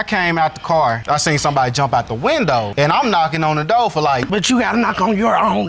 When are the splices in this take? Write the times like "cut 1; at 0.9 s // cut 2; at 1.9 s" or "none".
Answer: cut 1; at 4.2 s